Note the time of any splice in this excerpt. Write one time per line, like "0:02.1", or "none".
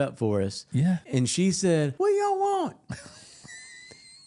0:01.0
0:01.9